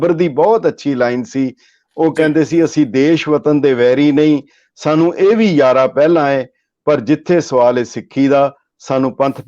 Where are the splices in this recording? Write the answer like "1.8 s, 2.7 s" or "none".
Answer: none